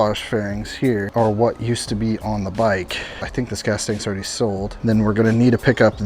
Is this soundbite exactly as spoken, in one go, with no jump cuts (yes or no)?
no